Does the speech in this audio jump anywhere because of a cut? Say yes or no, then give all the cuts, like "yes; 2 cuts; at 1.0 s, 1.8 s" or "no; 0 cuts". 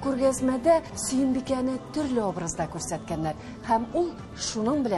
yes; 1 cut; at 1.0 s